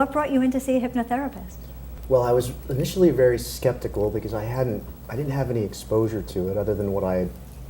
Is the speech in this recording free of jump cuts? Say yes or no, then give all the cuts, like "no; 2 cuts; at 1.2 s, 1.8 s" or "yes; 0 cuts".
no; 1 cut; at 6.3 s